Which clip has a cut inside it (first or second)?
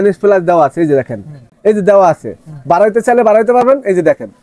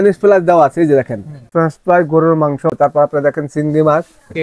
second